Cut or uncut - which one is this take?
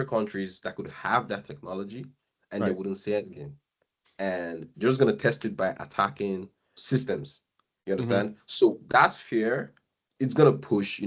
uncut